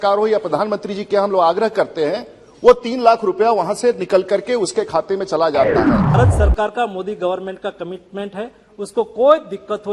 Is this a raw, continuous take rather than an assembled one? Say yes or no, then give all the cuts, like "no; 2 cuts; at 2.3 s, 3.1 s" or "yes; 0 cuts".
no; 1 cut; at 6.2 s